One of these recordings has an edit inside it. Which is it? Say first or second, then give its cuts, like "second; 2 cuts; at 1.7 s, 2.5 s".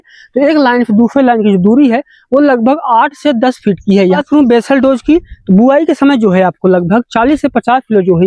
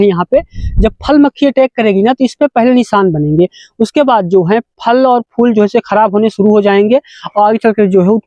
first; 1 cut; at 4.2 s